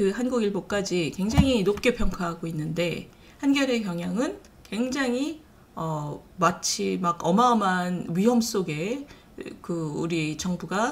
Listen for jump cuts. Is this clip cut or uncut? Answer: uncut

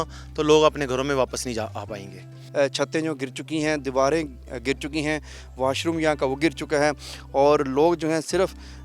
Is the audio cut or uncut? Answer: cut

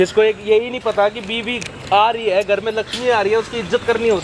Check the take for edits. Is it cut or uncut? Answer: uncut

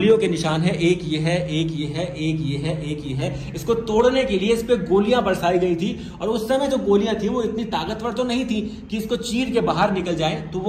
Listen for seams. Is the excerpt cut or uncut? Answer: uncut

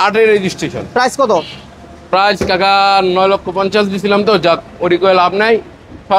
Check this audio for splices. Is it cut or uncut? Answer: uncut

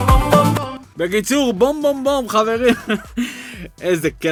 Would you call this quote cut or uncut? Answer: uncut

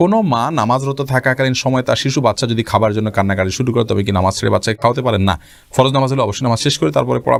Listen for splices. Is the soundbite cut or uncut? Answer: uncut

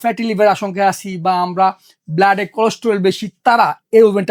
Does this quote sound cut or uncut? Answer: uncut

